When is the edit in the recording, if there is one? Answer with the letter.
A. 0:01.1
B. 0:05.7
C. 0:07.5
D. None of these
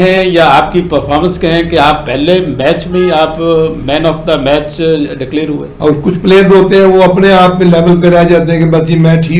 B